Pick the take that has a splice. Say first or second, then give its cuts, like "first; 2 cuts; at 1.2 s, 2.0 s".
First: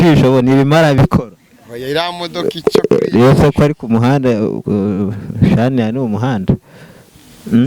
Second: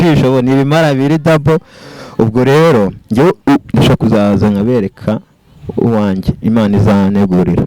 first; 1 cut; at 1.0 s